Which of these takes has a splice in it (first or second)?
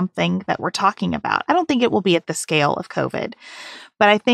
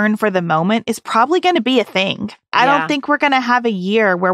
second